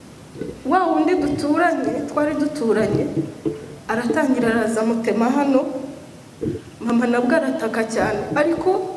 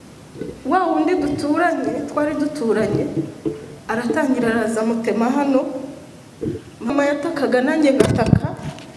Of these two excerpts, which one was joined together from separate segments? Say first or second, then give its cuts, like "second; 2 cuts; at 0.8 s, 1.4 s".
second; 1 cut; at 6.9 s